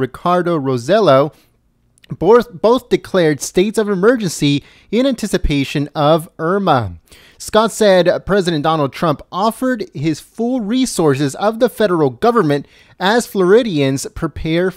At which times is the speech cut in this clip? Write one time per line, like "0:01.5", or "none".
none